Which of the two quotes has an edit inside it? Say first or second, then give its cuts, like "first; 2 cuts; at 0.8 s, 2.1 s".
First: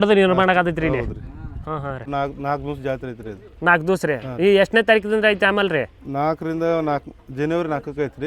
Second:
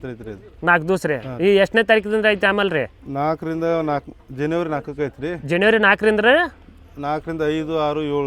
first; 1 cut; at 2.1 s